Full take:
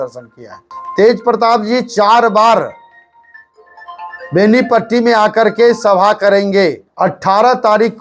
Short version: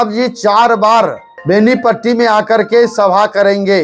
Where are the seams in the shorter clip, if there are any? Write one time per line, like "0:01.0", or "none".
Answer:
0:01.3